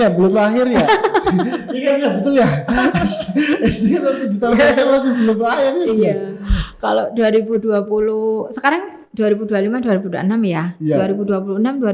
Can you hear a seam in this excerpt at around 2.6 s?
no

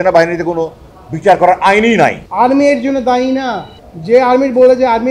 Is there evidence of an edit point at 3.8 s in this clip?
no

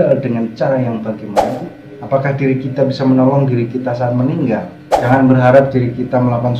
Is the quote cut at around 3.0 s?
no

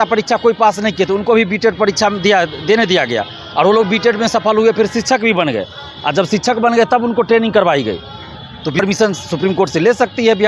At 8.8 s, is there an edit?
yes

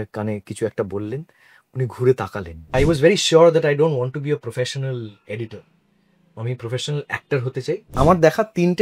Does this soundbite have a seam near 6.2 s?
no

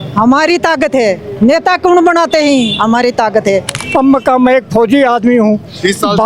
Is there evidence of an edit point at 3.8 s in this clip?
yes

